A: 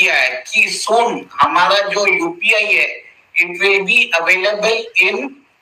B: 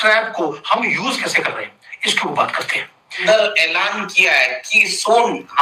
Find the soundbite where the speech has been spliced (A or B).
B